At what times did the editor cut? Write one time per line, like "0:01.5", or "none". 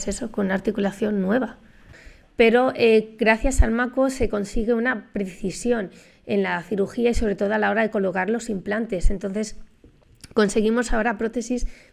0:02.0